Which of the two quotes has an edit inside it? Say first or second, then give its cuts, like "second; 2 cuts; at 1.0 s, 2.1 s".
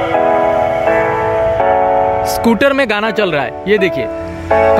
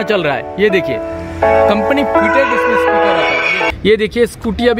second; 1 cut; at 3.7 s